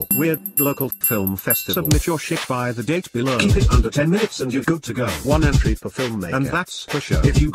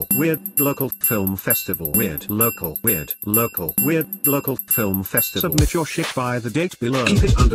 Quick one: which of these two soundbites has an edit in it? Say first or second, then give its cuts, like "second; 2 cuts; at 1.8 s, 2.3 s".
first; 1 cut; at 1.6 s